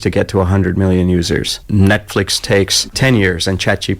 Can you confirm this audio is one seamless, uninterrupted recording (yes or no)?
no